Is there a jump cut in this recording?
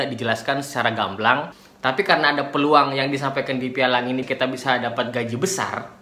yes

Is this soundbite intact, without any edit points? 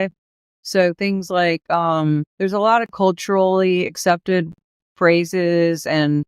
no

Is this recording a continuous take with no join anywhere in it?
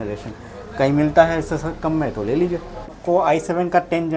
no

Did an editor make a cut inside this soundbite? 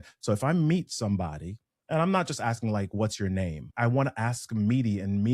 yes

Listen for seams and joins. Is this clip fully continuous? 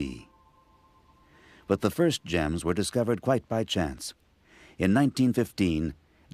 no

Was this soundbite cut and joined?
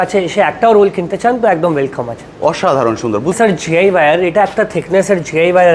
yes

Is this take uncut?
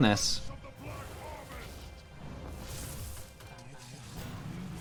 yes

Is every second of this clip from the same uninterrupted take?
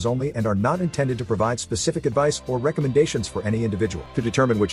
yes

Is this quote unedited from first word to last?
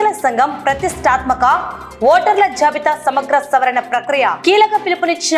yes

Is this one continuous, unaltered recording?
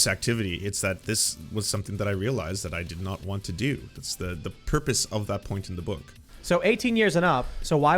no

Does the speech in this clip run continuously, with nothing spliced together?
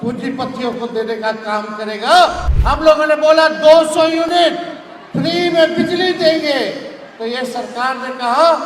no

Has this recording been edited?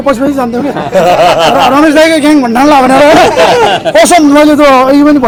no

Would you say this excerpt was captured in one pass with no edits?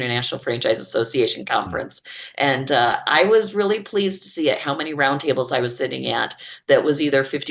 yes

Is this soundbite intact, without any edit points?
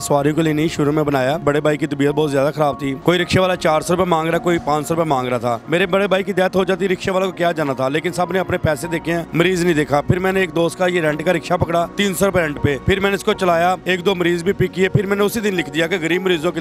no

